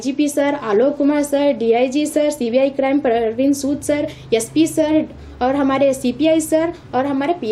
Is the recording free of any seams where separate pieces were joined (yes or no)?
yes